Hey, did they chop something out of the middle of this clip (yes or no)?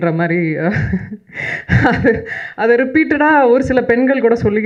no